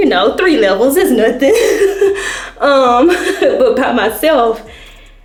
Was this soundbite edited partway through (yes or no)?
no